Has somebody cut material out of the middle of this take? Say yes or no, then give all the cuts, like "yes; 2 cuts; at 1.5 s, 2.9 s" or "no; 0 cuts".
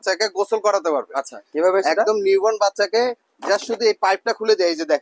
no; 0 cuts